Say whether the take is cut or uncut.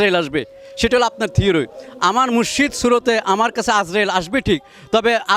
uncut